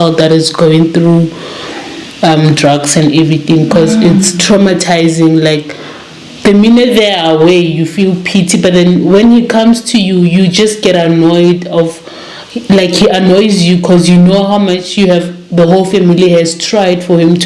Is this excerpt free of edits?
yes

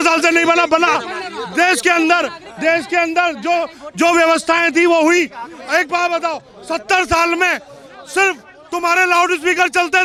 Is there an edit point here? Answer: no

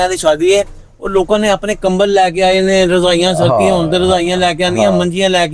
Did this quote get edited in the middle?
no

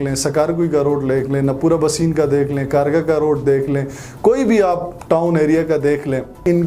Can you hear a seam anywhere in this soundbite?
no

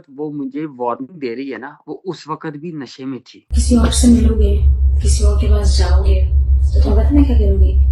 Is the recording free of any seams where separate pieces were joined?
no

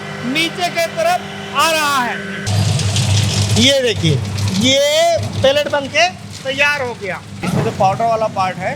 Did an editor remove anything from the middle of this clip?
yes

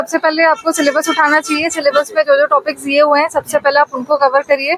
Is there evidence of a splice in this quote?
no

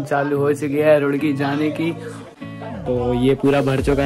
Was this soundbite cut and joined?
yes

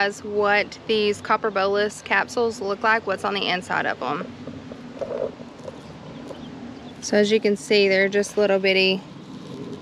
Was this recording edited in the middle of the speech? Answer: no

